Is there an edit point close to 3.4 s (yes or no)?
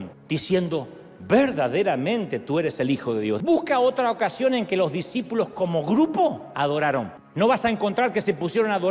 yes